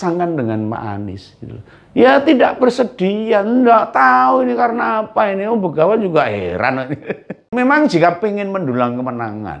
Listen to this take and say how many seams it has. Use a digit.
1